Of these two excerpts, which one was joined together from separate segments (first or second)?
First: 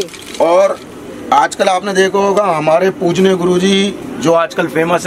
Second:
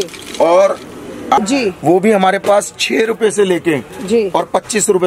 second